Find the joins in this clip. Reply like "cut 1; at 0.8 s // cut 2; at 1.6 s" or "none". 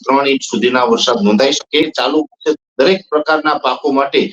cut 1; at 1.9 s